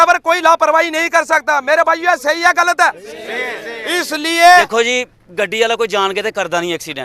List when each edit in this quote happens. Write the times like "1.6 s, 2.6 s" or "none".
4.7 s